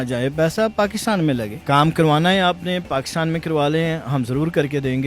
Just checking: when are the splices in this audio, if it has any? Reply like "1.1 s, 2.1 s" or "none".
1.5 s